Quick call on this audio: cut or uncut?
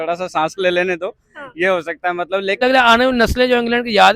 cut